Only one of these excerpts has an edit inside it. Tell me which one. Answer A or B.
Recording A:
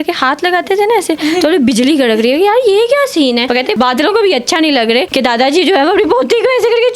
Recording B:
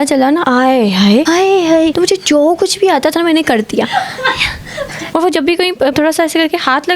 B